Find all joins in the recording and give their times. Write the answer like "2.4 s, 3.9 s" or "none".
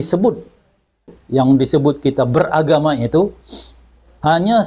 1.2 s

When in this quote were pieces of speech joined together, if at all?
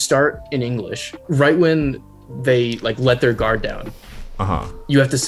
none

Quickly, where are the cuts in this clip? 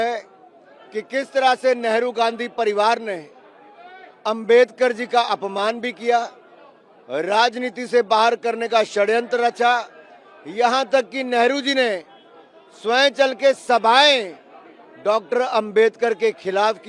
none

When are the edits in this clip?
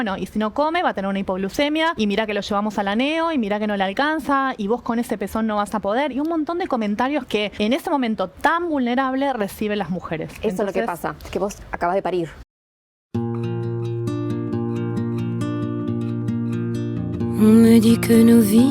1.9 s, 7.5 s, 11.2 s, 12.4 s

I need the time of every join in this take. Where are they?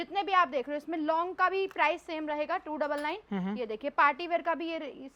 none

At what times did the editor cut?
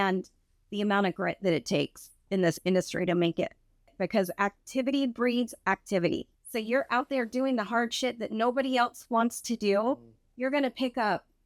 3.9 s, 6.4 s

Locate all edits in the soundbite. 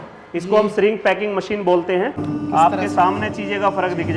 2.2 s

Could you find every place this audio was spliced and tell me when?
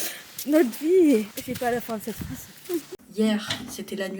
1.4 s, 3.0 s

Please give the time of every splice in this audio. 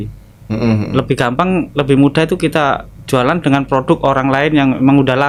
none

